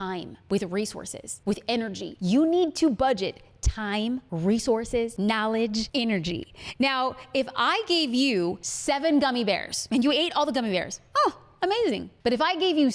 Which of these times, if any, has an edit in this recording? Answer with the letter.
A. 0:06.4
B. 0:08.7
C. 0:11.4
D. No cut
B